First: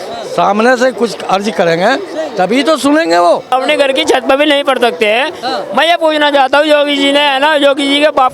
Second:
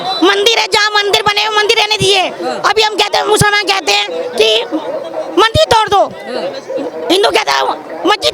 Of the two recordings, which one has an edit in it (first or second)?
first